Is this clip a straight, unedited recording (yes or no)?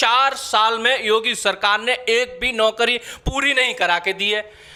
yes